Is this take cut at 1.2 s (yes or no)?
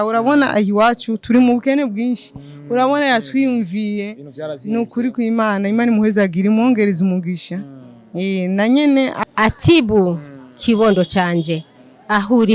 no